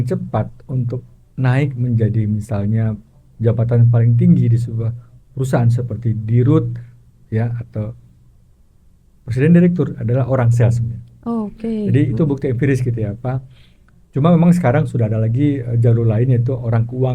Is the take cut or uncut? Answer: uncut